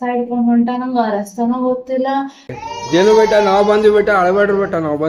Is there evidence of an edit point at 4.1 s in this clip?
no; 1 cut; at 2.5 s

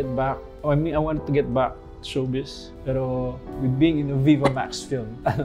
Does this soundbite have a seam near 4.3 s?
no; 1 cut; at 2.7 s

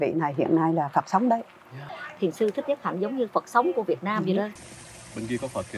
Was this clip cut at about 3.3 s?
no; 2 cuts; at 1.9 s, 4.5 s

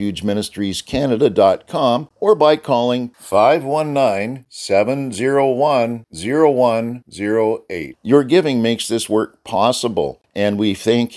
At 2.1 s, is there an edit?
yes; 2 cuts; at 2.1 s, 10.2 s

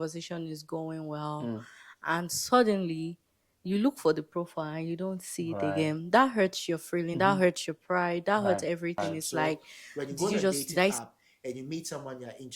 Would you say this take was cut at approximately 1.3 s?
no; 1 cut; at 11.0 s

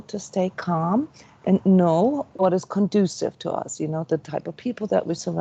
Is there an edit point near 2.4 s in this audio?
yes; 1 cut; at 2.4 s

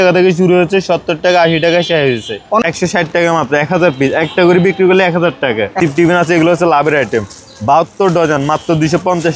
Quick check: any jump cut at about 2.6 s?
yes; 2 cuts; at 2.6 s, 5.8 s

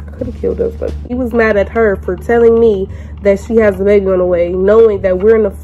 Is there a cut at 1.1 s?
yes; 1 cut; at 1.1 s

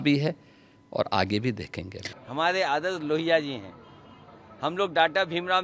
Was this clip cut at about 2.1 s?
yes; 1 cut; at 2.1 s

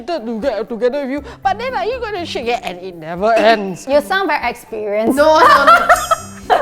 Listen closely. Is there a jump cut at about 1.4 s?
no; 1 cut; at 3.8 s

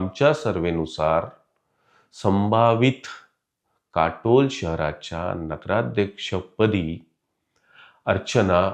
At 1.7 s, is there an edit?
no; 0 cuts

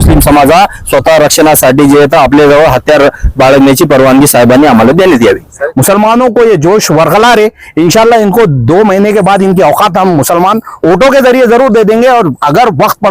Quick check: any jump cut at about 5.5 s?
yes; 1 cut; at 5.5 s

